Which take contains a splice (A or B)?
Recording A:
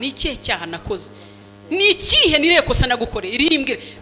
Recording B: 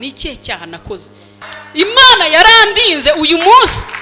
B